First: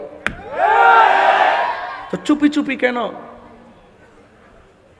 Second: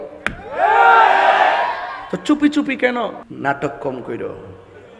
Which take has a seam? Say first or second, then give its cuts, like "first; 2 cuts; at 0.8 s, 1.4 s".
second; 1 cut; at 3.2 s